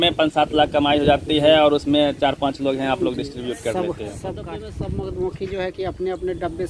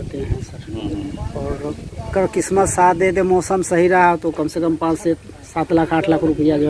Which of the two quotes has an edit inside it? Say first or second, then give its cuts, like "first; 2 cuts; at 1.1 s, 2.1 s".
first; 1 cut; at 4.4 s